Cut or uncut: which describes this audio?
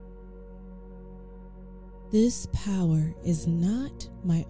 uncut